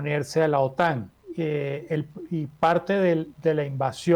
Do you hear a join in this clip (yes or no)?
yes